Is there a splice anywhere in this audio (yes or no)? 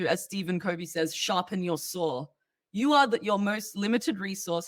no